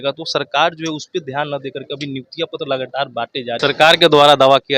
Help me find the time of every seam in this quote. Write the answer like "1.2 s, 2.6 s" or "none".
3.5 s